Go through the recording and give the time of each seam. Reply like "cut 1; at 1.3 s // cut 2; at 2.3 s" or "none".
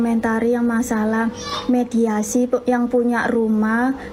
none